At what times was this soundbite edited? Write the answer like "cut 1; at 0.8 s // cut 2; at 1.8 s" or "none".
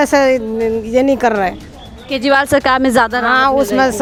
none